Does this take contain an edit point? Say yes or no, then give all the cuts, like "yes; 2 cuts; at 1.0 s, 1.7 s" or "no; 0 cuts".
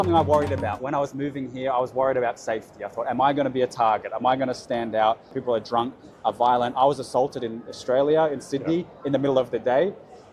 yes; 1 cut; at 5.3 s